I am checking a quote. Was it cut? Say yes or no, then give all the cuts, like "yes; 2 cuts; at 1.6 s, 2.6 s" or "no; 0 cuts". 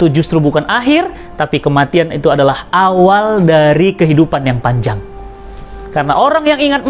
no; 0 cuts